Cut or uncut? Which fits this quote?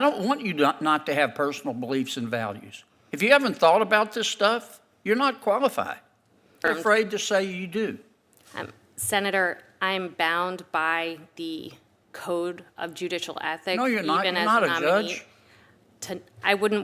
cut